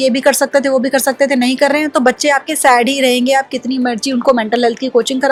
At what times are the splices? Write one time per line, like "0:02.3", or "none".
none